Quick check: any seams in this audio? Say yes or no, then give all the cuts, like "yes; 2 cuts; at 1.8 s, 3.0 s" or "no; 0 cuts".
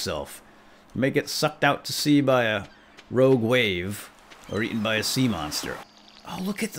yes; 1 cut; at 5.7 s